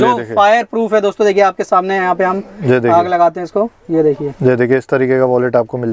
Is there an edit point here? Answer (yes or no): no